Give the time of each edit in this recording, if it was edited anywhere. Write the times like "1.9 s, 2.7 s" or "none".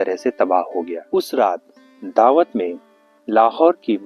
1.0 s